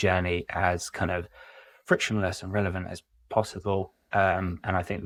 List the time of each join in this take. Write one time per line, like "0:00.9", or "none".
none